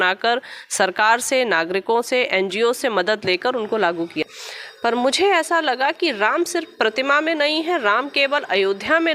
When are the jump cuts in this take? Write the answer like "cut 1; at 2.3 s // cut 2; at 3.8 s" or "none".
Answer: cut 1; at 4.2 s